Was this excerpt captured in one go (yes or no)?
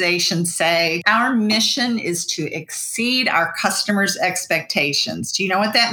no